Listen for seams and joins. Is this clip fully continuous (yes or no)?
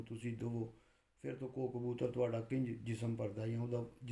yes